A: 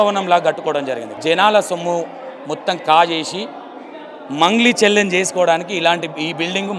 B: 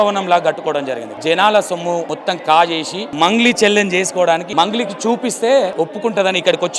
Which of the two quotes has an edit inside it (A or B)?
B